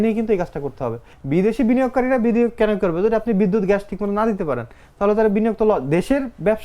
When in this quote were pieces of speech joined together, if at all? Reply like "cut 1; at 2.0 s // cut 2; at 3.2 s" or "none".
cut 1; at 1.1 s